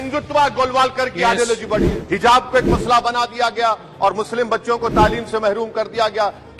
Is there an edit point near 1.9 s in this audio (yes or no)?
yes